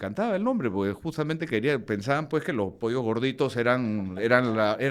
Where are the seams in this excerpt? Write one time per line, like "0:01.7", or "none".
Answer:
none